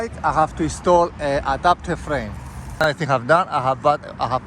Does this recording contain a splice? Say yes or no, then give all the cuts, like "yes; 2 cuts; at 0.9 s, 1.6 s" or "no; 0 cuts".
yes; 1 cut; at 2.8 s